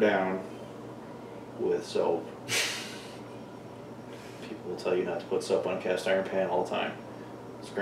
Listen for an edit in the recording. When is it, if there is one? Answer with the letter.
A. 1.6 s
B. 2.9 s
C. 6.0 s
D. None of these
D